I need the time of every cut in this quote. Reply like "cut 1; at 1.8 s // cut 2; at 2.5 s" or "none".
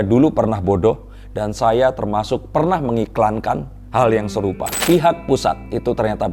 cut 1; at 4.7 s

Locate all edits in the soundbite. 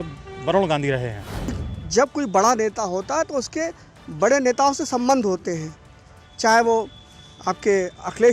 cut 1; at 1.6 s

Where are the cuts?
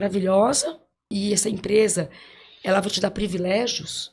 cut 1; at 1.1 s

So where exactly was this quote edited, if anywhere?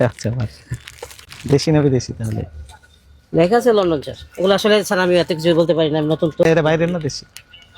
cut 1; at 1.3 s // cut 2; at 6.4 s

